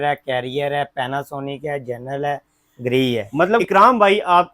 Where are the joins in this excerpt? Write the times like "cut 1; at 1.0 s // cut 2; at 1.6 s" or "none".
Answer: cut 1; at 3.6 s